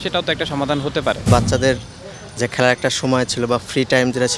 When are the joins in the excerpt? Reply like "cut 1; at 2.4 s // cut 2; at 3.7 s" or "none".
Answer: cut 1; at 1.2 s